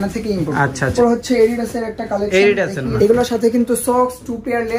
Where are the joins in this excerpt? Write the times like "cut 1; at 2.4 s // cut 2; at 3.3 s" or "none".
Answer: cut 1; at 0.9 s // cut 2; at 2.8 s